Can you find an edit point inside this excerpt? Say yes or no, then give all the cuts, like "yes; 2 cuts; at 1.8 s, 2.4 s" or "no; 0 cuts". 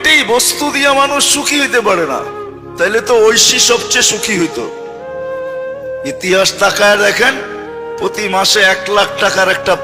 no; 0 cuts